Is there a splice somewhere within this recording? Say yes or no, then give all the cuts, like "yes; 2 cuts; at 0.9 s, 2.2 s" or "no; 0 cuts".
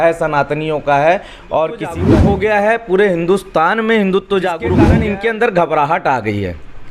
yes; 2 cuts; at 2.0 s, 4.9 s